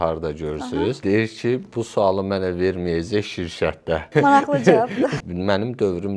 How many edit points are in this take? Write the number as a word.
three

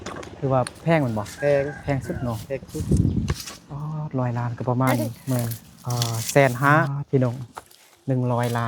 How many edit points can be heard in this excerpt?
one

